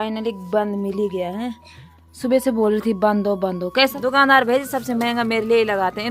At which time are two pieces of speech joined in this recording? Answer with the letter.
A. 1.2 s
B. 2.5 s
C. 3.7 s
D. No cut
C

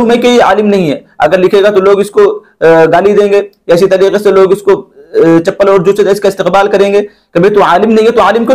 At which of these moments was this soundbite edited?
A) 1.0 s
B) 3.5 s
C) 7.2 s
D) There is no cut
D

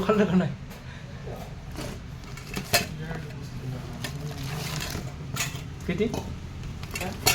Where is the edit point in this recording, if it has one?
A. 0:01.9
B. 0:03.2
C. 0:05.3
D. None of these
D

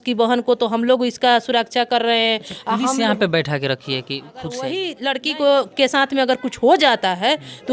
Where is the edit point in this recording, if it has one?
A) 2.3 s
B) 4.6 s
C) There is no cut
B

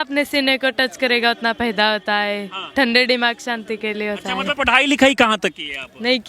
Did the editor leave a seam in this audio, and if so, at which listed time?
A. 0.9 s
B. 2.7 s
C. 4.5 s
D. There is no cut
C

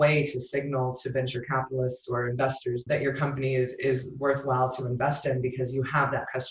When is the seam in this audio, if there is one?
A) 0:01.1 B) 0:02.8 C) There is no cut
B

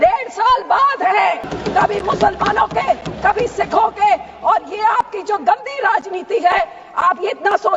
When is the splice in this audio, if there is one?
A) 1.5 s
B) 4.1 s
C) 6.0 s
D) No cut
A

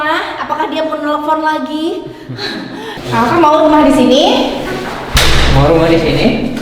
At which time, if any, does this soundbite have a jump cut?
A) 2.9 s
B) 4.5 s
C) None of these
A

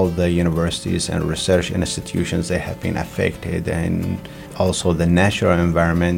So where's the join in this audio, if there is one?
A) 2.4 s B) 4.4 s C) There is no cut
B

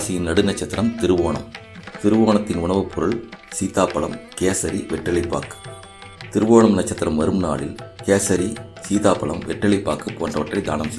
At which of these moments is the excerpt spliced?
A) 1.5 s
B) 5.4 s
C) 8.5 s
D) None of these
D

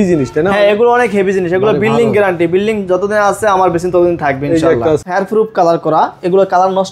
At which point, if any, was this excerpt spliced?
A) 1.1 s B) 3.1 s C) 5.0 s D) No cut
C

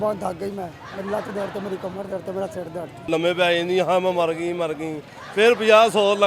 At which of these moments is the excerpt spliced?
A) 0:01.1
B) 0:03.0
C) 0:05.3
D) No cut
B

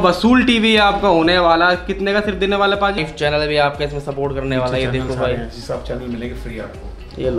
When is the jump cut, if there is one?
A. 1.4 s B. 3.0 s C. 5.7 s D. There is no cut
B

